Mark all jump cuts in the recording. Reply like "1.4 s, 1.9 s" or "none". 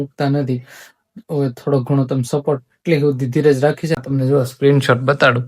4.0 s